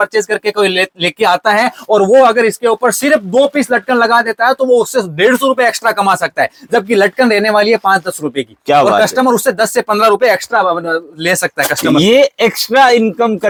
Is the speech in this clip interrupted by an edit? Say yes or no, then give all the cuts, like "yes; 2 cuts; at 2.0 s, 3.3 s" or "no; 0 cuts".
no; 0 cuts